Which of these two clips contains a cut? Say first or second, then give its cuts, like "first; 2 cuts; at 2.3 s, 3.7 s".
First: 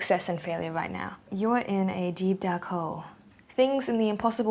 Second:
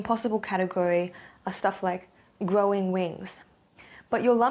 first; 2 cuts; at 1.3 s, 3.1 s